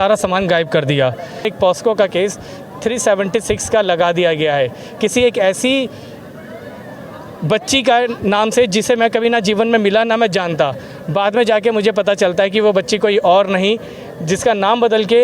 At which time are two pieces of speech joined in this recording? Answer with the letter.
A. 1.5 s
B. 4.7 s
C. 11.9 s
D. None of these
A